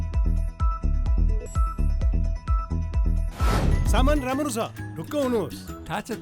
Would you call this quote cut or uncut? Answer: cut